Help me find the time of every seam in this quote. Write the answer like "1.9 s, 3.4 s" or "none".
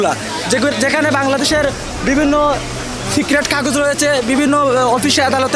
none